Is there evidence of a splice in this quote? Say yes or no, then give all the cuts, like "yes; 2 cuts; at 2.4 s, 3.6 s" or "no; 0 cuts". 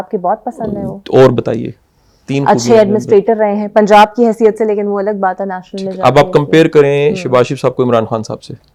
no; 0 cuts